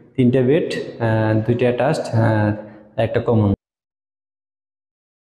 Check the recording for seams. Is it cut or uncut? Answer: cut